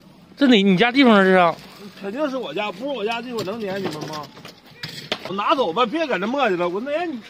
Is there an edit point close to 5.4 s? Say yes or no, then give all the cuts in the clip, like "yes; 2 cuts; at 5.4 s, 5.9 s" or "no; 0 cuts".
yes; 1 cut; at 5.4 s